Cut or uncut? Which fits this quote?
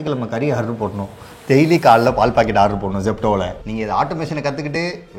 cut